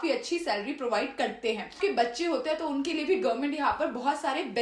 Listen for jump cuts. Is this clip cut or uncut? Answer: cut